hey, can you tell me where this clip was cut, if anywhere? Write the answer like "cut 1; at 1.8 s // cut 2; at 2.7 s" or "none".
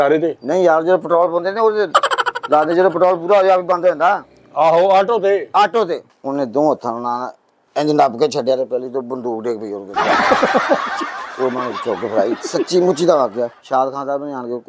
cut 1; at 6.1 s // cut 2; at 13.5 s

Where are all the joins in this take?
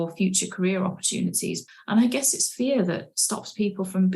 cut 1; at 1.6 s

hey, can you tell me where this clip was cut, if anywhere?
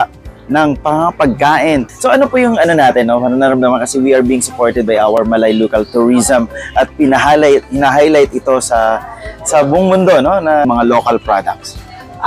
cut 1; at 1.9 s // cut 2; at 10.6 s

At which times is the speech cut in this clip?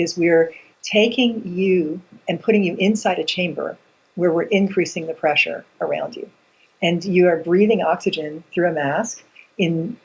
cut 1; at 2.1 s

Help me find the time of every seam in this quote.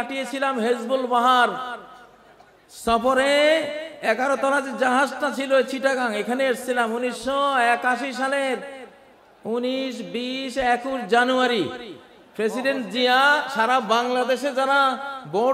none

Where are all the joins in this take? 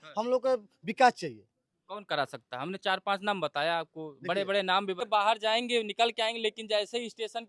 cut 1; at 5.1 s

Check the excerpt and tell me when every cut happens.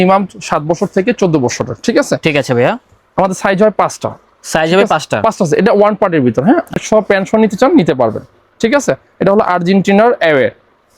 cut 1; at 6.8 s

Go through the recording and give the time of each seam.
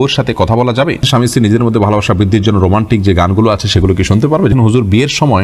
cut 1; at 1.0 s // cut 2; at 4.5 s

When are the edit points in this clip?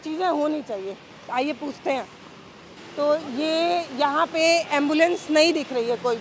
none

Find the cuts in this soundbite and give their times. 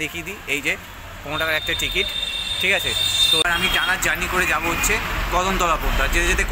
cut 1; at 3.4 s

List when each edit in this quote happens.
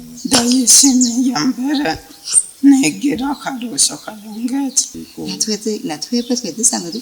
cut 1; at 4.8 s

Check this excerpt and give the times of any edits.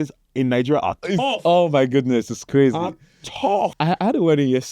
cut 1; at 3.7 s

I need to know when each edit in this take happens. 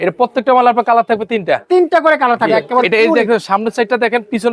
cut 1; at 2.6 s

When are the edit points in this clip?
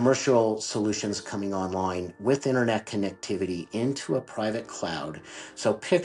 none

